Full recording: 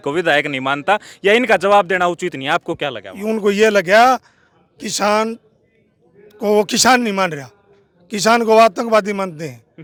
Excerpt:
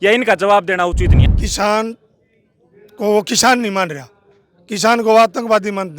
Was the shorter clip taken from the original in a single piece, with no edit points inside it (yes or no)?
no